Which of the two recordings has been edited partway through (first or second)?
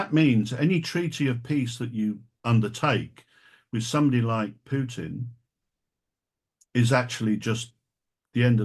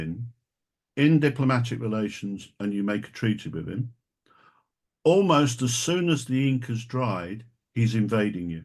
first